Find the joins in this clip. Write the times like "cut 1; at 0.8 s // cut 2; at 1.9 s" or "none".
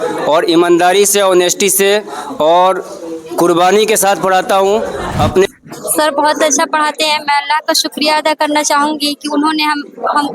cut 1; at 5.5 s